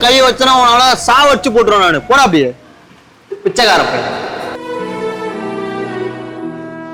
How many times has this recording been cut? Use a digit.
0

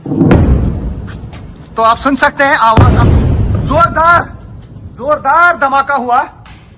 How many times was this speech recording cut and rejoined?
0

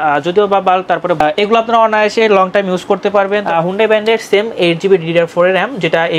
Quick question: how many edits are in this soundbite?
1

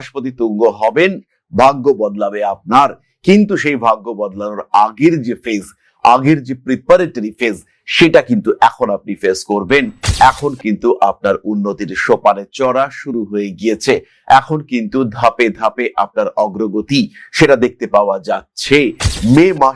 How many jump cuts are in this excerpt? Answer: 0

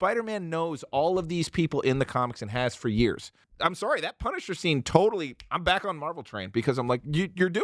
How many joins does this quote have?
1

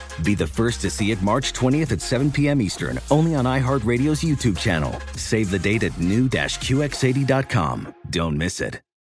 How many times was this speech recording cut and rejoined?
0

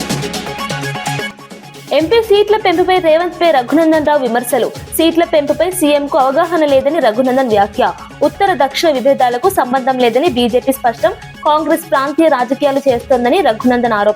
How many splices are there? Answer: 1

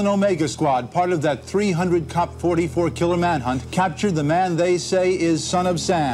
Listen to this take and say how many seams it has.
1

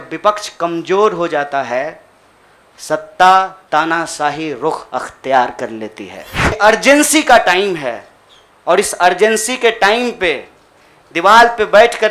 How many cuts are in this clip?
1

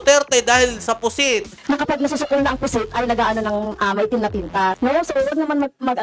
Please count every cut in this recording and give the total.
2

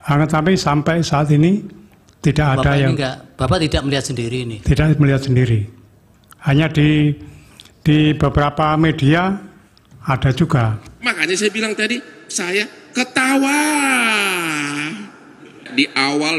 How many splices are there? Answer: 1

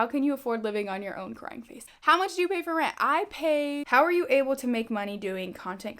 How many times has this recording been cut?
2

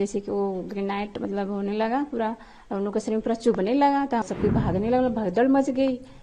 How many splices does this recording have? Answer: 1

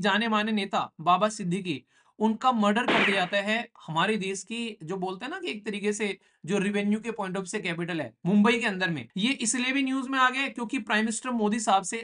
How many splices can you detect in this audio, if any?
1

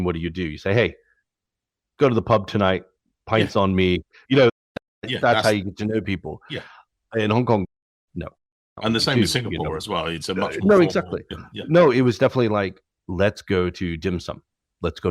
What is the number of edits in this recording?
1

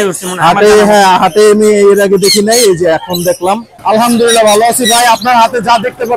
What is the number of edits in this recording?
1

